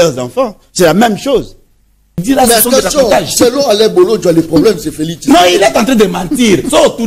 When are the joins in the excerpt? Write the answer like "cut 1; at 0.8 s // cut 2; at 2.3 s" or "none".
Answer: cut 1; at 2.1 s